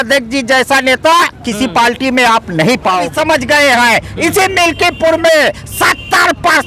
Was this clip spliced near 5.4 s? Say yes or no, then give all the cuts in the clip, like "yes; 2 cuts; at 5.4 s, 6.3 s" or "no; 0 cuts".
no; 1 cut; at 3.1 s